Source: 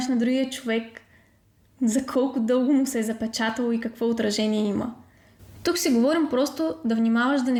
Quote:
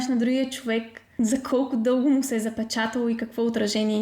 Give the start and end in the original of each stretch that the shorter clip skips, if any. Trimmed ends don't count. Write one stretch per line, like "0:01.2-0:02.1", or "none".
0:01.0-0:01.6